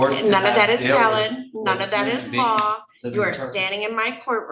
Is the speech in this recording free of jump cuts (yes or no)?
yes